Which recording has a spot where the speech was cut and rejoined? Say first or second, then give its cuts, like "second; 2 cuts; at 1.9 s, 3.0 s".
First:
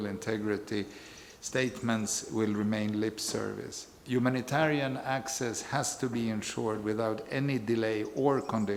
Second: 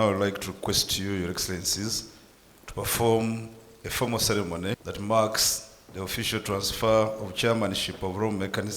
second; 1 cut; at 4.9 s